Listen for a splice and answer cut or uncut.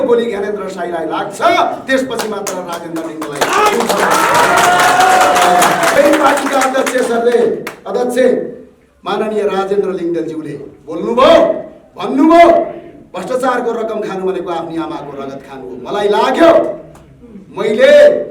cut